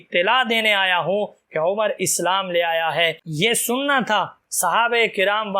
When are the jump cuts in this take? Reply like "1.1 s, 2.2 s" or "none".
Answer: 3.3 s

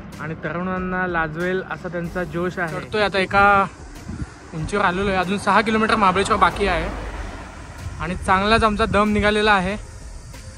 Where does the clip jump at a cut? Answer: 2.8 s

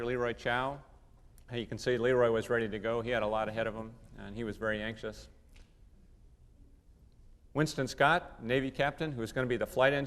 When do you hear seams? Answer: 2.3 s

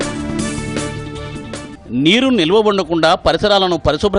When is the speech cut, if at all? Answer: 1.7 s

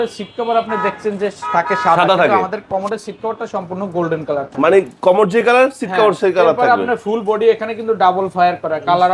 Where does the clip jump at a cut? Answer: none

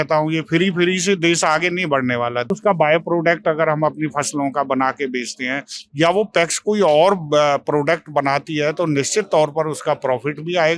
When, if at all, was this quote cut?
2.5 s

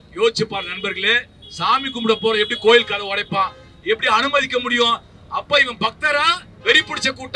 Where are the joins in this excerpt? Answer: none

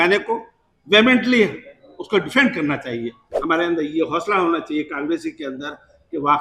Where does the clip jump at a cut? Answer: 3.3 s

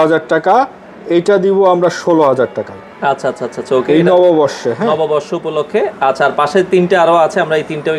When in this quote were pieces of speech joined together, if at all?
none

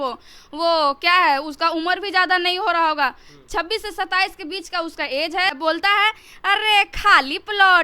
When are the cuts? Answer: 5.6 s

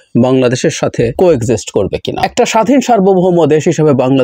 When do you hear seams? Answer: 1.1 s, 2.2 s

